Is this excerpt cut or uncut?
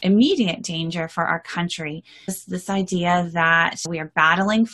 cut